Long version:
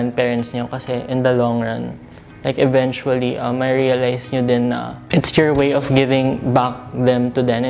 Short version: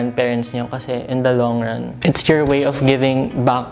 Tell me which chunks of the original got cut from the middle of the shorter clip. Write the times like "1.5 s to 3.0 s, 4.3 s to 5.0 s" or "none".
1.9 s to 5.0 s